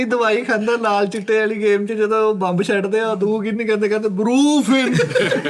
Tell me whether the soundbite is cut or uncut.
uncut